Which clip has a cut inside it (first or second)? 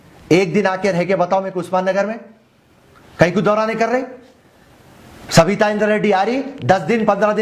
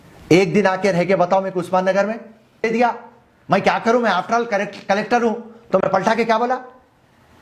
second